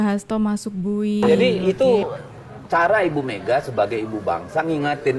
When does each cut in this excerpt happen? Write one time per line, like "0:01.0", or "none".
0:01.2